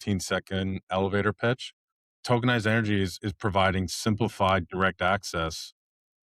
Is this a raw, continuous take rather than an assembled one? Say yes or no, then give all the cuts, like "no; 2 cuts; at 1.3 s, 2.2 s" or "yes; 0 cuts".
no; 1 cut; at 2.2 s